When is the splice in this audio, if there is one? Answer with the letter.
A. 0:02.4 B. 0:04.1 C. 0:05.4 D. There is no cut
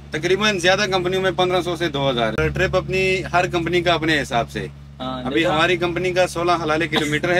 A